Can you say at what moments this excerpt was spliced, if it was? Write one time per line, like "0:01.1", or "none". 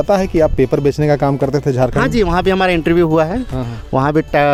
none